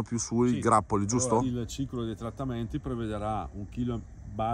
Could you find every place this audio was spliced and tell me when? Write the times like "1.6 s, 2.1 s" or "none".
1.4 s